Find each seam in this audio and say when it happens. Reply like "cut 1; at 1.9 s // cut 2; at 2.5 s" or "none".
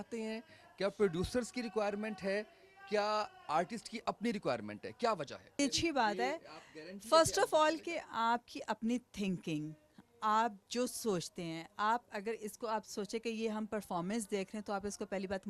cut 1; at 5.6 s